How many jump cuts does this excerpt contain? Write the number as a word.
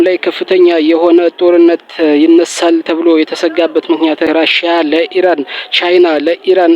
one